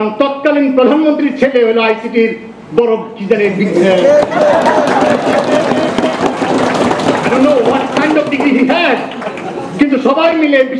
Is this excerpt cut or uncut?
uncut